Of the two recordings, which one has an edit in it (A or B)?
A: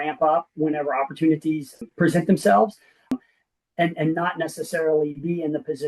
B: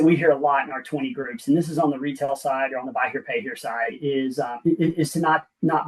A